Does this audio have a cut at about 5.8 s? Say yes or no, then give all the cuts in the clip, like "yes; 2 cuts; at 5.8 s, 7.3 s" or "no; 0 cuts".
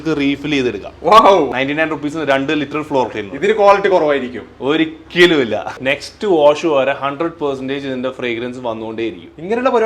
yes; 2 cuts; at 1.5 s, 5.8 s